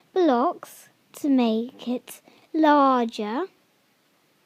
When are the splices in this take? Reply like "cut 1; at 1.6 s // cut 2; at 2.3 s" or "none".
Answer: none